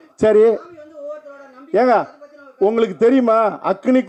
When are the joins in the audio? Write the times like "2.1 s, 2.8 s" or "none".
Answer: none

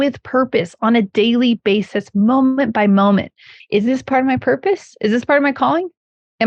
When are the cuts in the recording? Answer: 1.1 s, 3.5 s

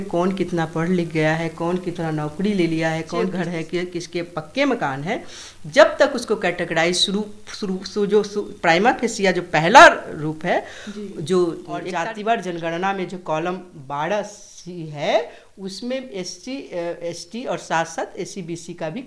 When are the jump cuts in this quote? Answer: 3.3 s, 11.9 s

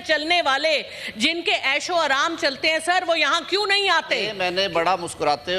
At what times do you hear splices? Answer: 4.3 s

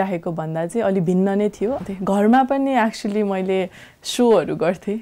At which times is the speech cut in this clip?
1.8 s

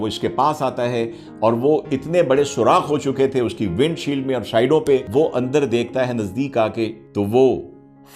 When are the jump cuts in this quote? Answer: 5.1 s, 7.0 s

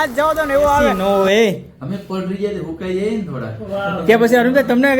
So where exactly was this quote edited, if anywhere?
1.0 s

